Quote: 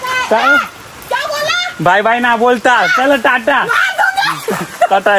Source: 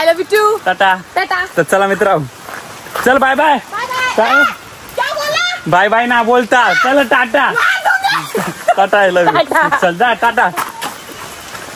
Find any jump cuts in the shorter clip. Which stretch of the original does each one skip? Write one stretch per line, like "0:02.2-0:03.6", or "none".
none